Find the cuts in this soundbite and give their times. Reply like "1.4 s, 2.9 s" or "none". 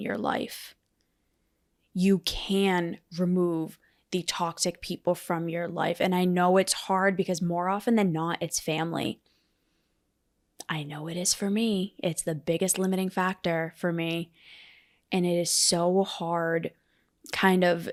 none